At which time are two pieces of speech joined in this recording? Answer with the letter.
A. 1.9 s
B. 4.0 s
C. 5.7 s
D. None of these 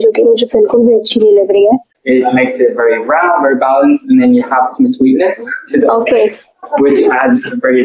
A